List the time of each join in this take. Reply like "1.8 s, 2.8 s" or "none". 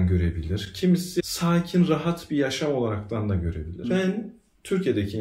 3.7 s

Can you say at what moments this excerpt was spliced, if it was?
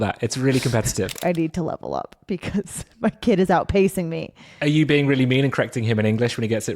1.1 s

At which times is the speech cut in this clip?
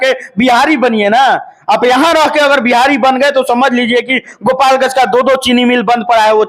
none

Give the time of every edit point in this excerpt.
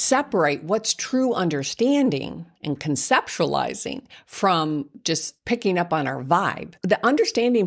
5.3 s, 6.8 s

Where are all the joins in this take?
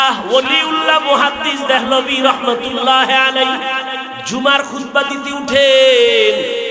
4.1 s

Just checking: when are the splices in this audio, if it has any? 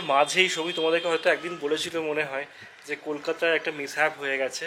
none

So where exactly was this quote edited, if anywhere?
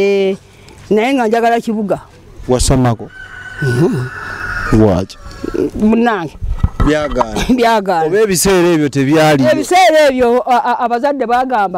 none

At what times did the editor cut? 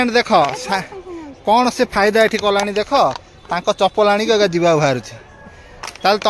none

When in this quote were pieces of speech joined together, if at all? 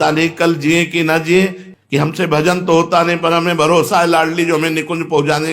1.6 s

